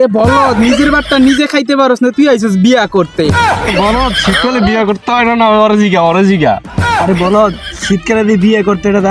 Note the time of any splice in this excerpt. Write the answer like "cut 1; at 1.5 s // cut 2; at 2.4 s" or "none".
cut 1; at 3.7 s